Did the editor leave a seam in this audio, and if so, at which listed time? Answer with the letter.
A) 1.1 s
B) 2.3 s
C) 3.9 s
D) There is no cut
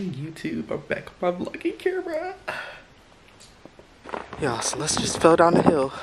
C